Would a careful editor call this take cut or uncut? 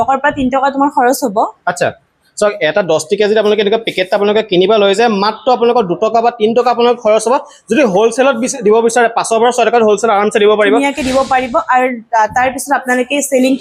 uncut